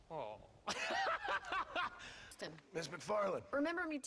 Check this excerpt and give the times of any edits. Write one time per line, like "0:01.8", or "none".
0:02.5